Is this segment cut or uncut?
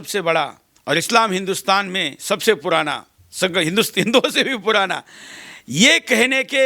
uncut